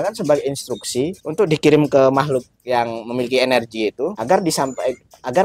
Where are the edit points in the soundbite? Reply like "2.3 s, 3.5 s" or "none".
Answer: 1.2 s, 4.2 s